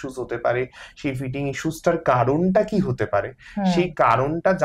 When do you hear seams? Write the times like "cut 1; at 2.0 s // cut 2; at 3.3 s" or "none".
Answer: none